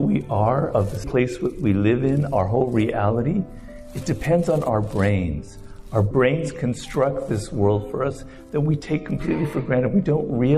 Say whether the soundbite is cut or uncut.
cut